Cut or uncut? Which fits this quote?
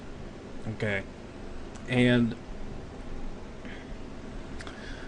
uncut